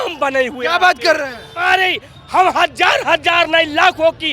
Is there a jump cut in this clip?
yes; 1 cut; at 1.6 s

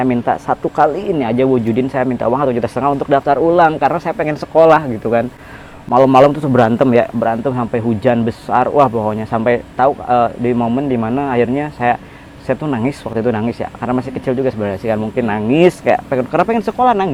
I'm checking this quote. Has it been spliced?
no; 0 cuts

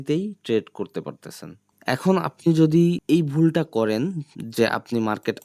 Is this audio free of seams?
yes; 0 cuts

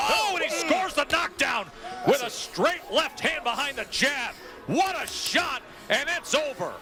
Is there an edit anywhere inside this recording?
no; 0 cuts

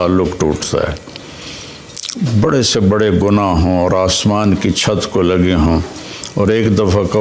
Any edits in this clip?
no; 0 cuts

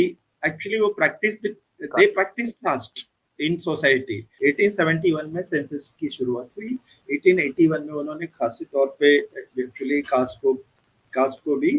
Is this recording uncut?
no; 1 cut; at 4.2 s

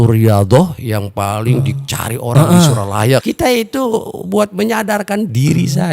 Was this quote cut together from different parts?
yes; 1 cut; at 3.2 s

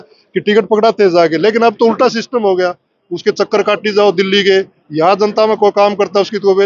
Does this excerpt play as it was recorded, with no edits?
yes; 0 cuts

